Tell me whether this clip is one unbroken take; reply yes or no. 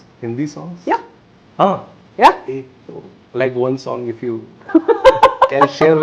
yes